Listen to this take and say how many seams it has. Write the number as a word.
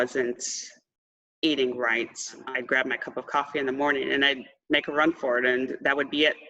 one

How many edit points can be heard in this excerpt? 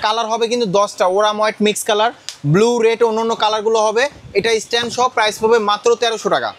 zero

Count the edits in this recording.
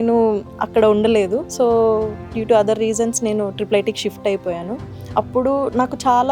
one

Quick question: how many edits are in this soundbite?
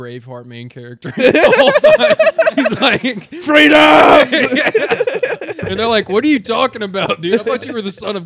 zero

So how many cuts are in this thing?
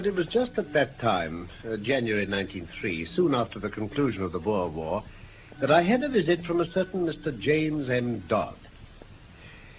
one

